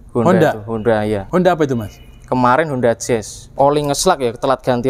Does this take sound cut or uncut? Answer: cut